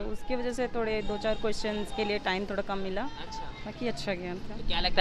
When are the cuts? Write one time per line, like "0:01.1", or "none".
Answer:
none